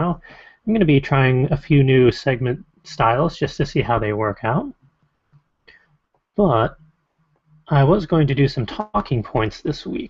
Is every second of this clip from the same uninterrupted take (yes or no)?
yes